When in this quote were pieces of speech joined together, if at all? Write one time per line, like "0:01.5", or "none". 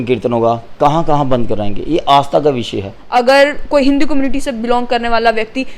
0:02.9